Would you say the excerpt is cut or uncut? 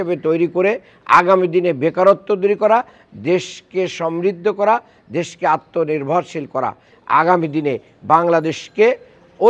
cut